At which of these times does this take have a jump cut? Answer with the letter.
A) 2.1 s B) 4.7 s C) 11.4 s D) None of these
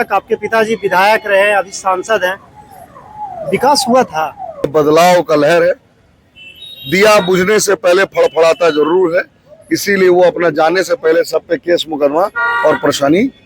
B